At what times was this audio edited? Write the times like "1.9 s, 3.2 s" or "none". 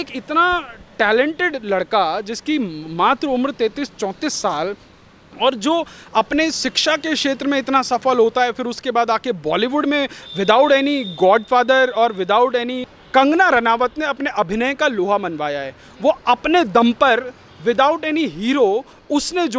12.8 s